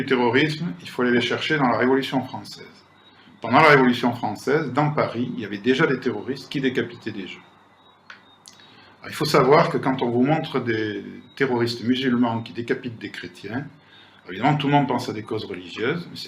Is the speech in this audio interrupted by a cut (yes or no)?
yes